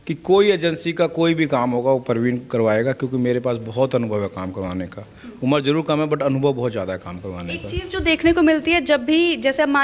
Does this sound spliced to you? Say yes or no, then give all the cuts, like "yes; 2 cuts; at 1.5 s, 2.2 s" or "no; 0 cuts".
no; 0 cuts